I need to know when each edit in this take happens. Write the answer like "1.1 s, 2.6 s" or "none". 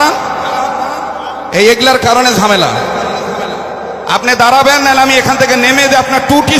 none